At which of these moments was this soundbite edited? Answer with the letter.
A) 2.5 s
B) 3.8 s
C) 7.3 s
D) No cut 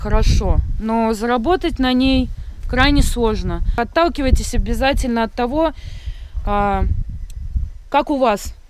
B